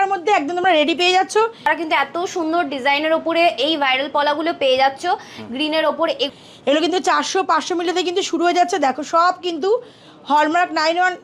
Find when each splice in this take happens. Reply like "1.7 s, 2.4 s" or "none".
1.7 s, 6.3 s

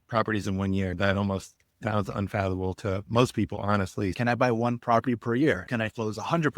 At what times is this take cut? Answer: 0.9 s, 4.2 s, 5.7 s

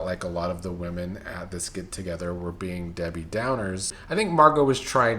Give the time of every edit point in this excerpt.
4.0 s

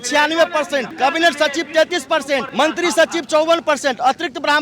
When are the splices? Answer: 0.9 s, 2.5 s

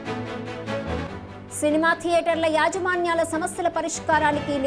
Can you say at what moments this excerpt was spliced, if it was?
none

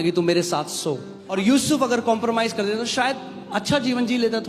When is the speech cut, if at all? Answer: 1.1 s

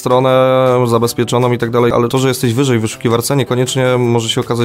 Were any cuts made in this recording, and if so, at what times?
1.9 s

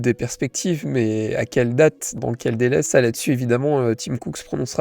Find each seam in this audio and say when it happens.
2.3 s

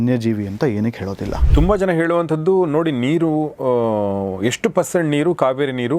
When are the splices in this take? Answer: 1.3 s

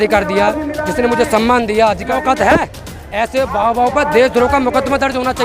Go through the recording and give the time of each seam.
2.1 s

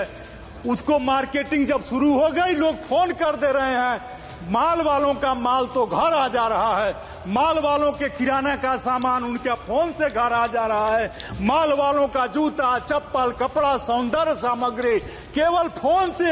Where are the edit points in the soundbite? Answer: none

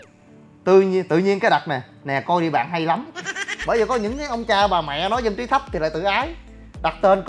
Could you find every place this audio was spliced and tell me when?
3.6 s

